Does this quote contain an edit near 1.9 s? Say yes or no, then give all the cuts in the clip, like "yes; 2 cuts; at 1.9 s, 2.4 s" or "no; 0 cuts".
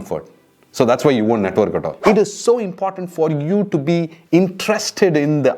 yes; 1 cut; at 1.9 s